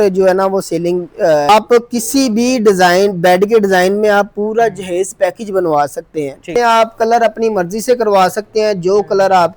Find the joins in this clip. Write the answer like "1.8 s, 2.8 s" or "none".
1.5 s, 6.5 s